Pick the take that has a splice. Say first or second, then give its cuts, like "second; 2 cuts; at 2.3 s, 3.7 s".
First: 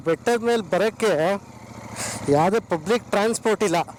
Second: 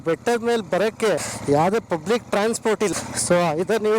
second; 2 cuts; at 1.2 s, 2.9 s